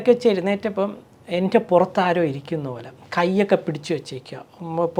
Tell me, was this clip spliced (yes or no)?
no